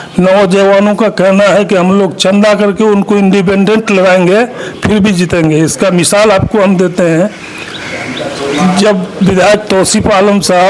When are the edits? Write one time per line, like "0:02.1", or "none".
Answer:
none